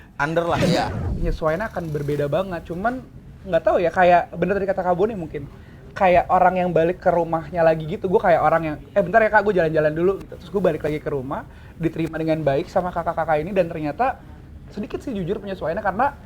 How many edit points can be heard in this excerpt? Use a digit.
1